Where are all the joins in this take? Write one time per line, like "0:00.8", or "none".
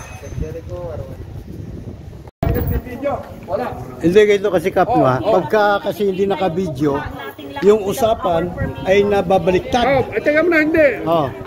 0:02.4